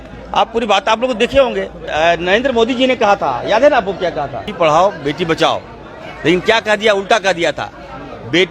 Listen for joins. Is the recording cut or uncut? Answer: cut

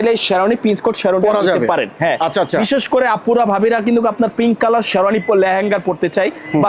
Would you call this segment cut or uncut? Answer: uncut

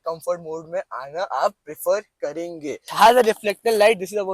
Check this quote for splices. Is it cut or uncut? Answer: cut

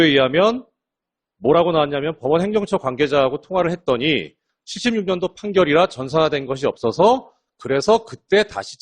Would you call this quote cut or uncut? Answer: cut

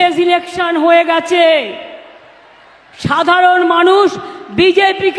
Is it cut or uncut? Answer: uncut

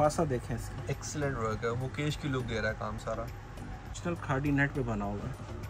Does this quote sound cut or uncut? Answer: cut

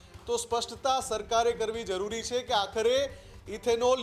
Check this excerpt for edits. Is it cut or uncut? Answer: uncut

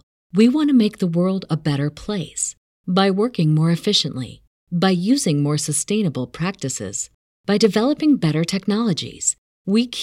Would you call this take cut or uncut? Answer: uncut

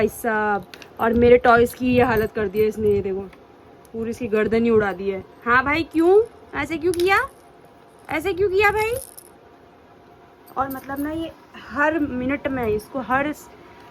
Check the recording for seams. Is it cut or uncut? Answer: uncut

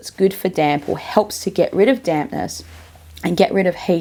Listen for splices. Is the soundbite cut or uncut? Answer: uncut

